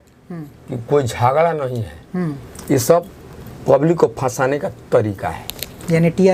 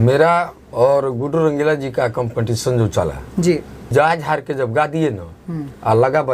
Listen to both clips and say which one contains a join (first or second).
second